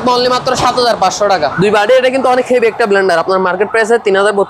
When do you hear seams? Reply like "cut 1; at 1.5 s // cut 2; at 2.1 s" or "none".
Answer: cut 1; at 1.5 s